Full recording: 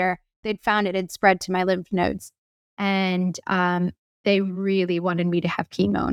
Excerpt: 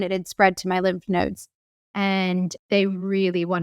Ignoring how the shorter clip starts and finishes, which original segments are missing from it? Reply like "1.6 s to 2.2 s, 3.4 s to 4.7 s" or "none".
3.4 s to 4.1 s